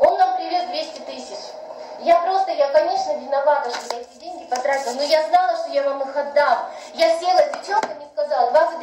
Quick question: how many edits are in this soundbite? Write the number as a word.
zero